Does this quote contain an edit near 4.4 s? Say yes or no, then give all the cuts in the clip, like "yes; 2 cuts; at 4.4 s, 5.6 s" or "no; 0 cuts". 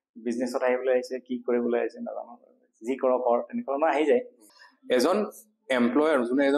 yes; 1 cut; at 4.4 s